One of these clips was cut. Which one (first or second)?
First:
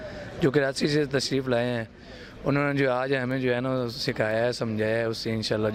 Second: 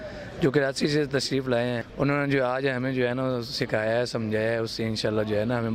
second